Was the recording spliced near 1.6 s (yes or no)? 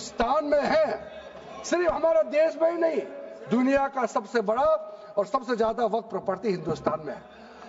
no